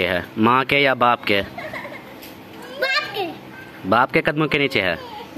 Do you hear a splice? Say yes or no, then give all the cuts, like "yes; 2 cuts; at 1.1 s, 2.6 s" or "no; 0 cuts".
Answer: no; 0 cuts